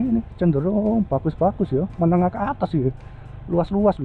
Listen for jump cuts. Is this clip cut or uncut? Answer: uncut